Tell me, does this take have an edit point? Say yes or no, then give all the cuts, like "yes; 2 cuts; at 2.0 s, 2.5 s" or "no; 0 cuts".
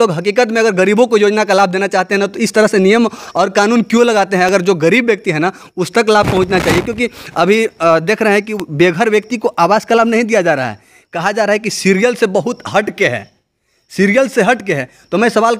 no; 0 cuts